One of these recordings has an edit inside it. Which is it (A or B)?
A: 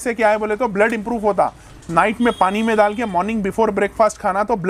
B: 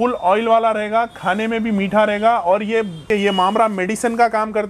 B